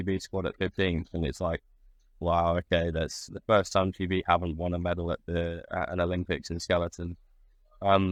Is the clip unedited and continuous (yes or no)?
yes